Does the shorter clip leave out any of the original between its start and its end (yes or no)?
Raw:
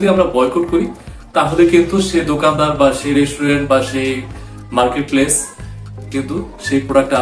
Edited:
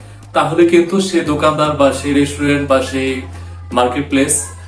no